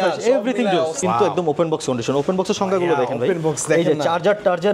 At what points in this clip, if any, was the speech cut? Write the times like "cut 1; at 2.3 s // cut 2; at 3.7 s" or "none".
cut 1; at 1.0 s